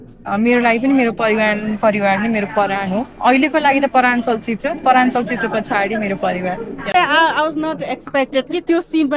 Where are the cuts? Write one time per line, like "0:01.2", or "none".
0:06.9